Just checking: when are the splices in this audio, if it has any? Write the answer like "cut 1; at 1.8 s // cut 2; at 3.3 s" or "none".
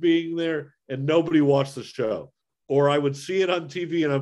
cut 1; at 2.4 s